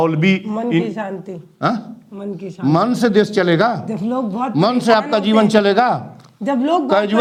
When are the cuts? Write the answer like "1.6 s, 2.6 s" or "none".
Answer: none